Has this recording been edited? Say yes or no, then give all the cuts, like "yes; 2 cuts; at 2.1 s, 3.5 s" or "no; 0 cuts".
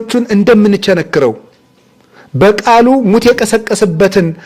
no; 0 cuts